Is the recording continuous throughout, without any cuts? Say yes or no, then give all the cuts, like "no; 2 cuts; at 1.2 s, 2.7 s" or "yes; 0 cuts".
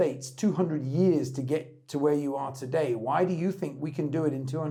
yes; 0 cuts